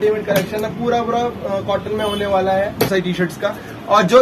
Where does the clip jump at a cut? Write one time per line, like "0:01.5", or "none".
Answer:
0:02.9